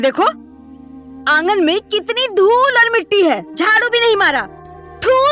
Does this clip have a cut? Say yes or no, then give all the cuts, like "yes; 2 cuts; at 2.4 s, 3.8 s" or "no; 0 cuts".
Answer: no; 0 cuts